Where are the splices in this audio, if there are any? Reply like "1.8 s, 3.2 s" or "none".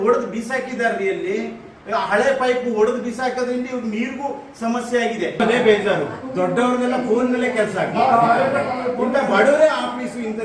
5.3 s

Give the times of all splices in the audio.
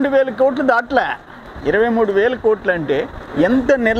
1.5 s

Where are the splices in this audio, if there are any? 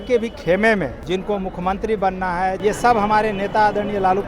1.0 s, 2.6 s

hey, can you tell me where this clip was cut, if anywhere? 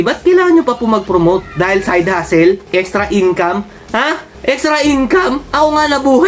2.6 s

